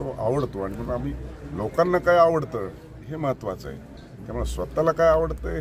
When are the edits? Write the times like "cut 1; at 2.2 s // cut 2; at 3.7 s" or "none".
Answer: none